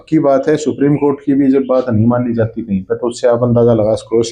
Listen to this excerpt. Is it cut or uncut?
uncut